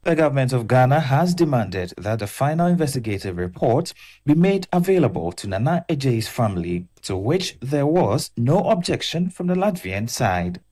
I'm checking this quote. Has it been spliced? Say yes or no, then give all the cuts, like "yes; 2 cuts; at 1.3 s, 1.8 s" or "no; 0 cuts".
no; 0 cuts